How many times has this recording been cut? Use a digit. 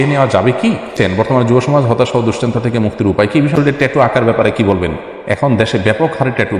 2